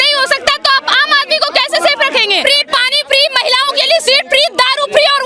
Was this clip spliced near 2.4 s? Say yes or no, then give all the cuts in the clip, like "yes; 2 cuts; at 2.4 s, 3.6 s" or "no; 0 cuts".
yes; 1 cut; at 2.4 s